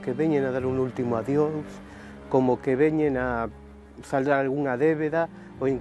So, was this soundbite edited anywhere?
no; 0 cuts

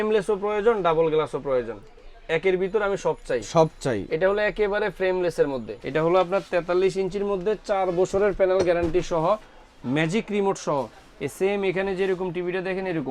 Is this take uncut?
no; 1 cut; at 5.7 s

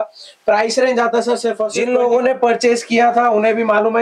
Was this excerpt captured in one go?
no; 1 cut; at 1.7 s

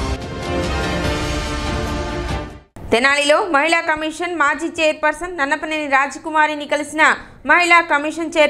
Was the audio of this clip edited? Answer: no; 0 cuts

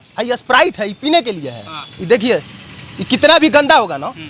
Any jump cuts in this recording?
no; 0 cuts

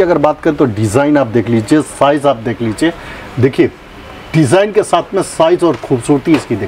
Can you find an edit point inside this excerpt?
no; 0 cuts

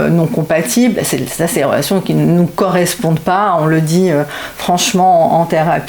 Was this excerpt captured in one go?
yes; 0 cuts

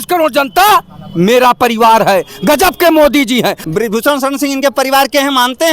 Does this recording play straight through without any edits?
no; 1 cut; at 3.6 s

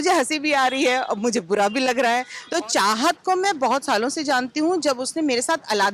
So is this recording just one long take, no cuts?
no; 1 cut; at 2.4 s

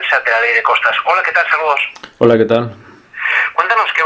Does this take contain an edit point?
no; 0 cuts

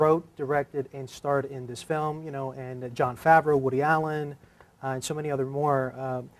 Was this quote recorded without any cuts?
no; 1 cut; at 5.3 s

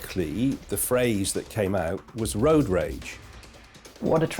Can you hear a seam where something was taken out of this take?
yes; 1 cut; at 3.4 s

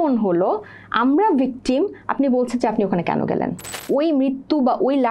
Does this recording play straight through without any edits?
no; 1 cut; at 3.7 s

